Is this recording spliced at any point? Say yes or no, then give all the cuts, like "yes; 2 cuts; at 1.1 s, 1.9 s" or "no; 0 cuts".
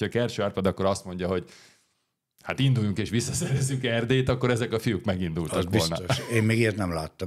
no; 0 cuts